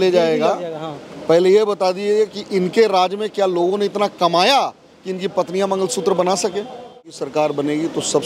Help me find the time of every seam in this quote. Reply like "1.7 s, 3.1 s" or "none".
7.2 s